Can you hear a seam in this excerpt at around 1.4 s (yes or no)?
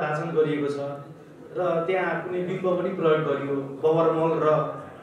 no